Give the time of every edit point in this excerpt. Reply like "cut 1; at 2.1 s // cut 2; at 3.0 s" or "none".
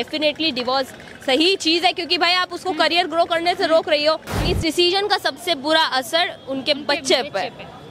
cut 1; at 4.4 s